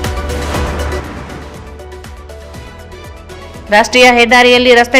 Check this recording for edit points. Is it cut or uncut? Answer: cut